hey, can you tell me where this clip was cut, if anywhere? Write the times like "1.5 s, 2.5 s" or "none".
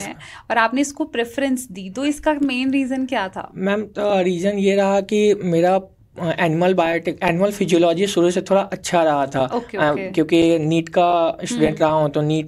none

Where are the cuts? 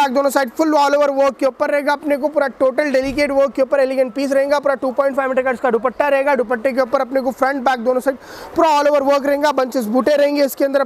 none

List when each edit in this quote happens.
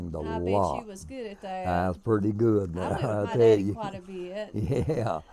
none

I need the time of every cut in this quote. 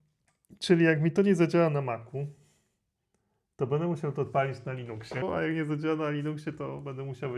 5.2 s

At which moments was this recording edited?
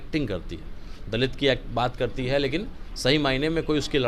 none

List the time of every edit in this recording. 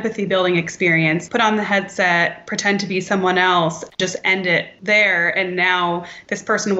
1.2 s, 4.7 s

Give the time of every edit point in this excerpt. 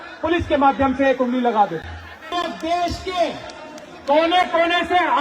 2.3 s

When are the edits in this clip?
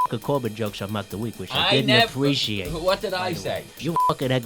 none

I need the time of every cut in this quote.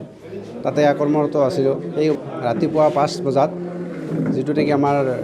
2.2 s

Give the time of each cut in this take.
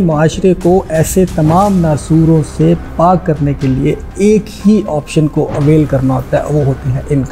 none

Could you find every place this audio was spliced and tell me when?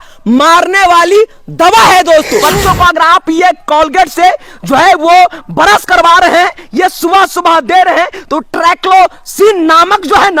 2.4 s

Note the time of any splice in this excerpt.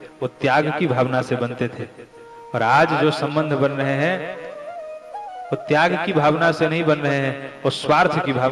none

